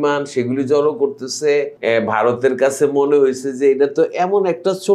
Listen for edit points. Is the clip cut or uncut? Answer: cut